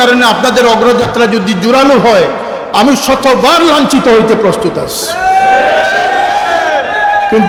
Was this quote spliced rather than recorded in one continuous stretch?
no; 0 cuts

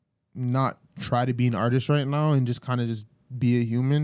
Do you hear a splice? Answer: no; 0 cuts

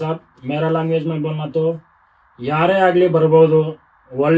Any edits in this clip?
no; 0 cuts

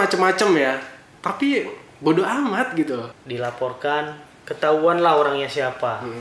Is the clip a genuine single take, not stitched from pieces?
no; 1 cut; at 3.1 s

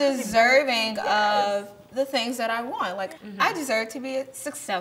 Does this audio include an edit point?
yes; 1 cut; at 3.1 s

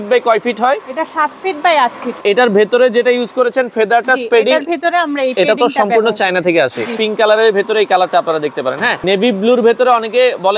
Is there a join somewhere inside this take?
yes; 3 cuts; at 2.2 s, 6.9 s, 9.0 s

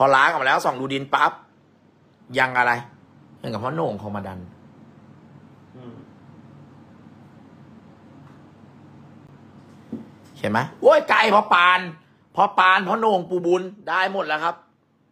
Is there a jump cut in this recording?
no; 0 cuts

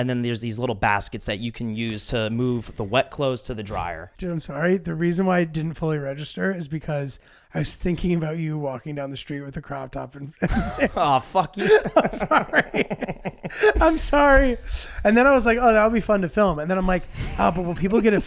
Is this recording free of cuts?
no; 1 cut; at 4.1 s

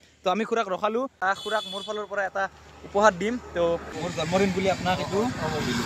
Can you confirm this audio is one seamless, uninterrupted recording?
no; 2 cuts; at 1.2 s, 3.8 s

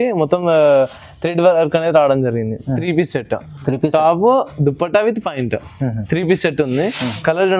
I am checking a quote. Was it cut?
yes; 1 cut; at 2.7 s

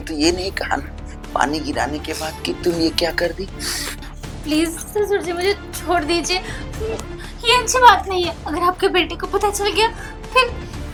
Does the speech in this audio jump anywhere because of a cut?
no; 0 cuts

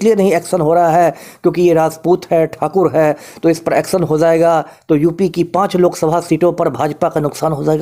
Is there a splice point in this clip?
no; 0 cuts

